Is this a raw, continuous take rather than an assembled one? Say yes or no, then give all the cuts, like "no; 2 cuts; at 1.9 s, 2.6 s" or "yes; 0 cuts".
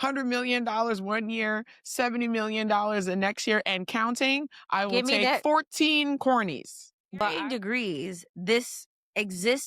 no; 1 cut; at 7.2 s